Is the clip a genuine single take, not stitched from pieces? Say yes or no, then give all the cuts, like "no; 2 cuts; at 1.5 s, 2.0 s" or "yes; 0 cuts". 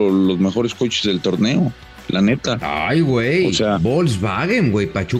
yes; 0 cuts